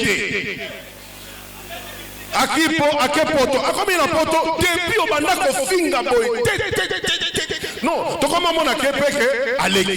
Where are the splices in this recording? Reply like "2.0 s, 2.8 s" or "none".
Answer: none